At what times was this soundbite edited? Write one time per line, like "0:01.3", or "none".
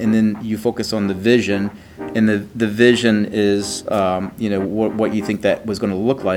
none